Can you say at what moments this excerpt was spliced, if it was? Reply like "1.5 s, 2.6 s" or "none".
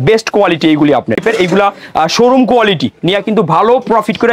1.2 s